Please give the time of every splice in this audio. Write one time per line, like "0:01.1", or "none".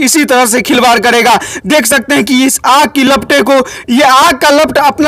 none